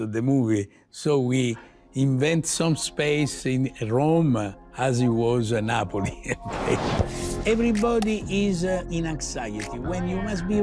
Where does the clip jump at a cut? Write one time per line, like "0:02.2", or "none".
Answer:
0:07.1
0:08.9